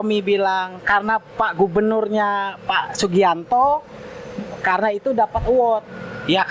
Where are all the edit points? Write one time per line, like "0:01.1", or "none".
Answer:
none